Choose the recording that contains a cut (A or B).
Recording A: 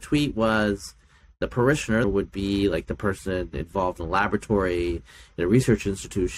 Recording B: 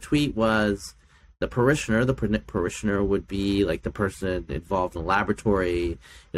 A